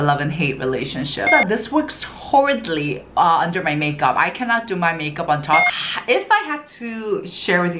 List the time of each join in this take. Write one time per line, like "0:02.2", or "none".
0:01.3
0:05.7